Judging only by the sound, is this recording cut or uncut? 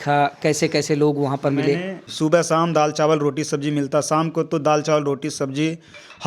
cut